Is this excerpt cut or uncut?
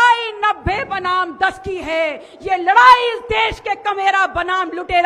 uncut